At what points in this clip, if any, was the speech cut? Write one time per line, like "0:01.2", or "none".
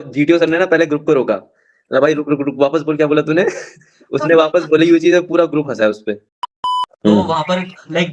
0:06.6